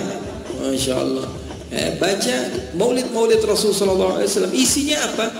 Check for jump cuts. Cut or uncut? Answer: uncut